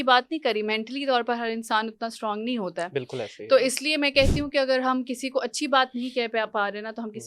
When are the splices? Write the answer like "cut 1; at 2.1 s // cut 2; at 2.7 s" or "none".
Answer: none